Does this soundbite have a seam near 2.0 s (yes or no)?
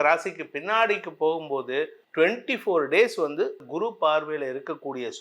yes